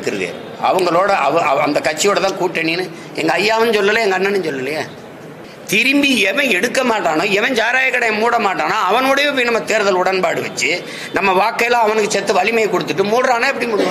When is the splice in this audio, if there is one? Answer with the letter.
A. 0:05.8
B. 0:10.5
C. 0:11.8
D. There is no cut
A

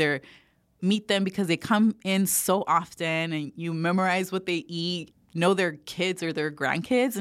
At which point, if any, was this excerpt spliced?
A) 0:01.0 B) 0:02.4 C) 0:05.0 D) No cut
C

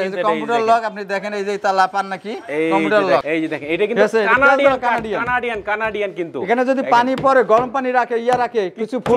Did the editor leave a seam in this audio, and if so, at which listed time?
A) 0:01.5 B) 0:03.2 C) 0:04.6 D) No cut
B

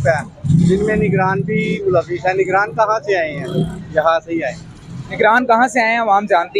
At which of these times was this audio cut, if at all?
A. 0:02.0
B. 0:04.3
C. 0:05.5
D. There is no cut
D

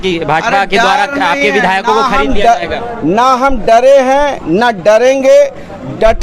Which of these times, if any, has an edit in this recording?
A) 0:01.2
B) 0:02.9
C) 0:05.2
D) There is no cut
D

